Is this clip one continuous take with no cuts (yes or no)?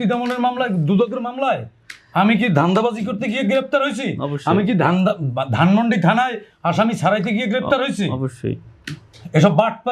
yes